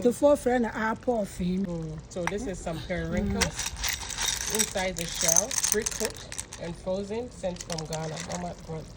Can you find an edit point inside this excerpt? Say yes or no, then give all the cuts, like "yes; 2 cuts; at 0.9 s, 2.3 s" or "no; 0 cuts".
yes; 1 cut; at 1.7 s